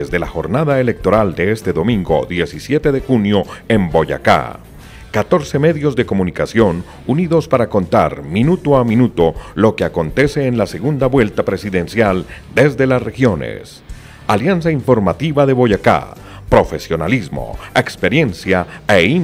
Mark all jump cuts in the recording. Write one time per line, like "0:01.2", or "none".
none